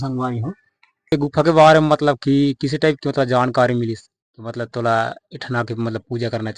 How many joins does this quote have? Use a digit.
1